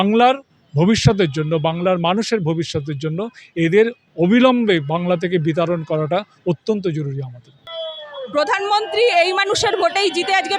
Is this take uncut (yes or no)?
no